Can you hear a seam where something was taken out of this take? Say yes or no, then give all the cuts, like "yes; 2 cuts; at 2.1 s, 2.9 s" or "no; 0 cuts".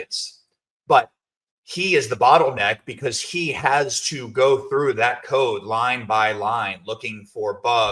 no; 0 cuts